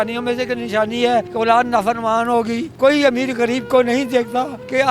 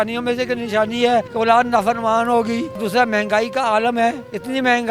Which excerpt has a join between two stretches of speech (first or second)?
first